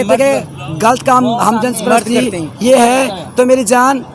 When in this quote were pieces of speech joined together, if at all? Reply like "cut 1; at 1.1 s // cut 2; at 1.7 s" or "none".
none